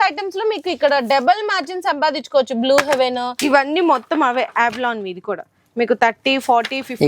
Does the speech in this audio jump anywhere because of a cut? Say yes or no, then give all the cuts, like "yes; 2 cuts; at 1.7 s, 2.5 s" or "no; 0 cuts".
yes; 1 cut; at 3.3 s